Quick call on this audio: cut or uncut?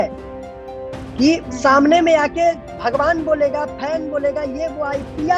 uncut